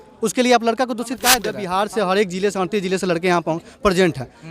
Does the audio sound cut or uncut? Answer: cut